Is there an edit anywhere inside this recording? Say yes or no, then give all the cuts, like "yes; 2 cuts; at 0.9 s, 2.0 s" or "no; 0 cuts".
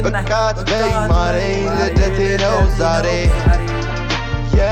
no; 0 cuts